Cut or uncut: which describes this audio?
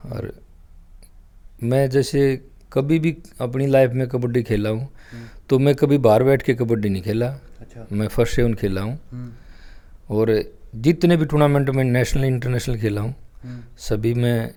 uncut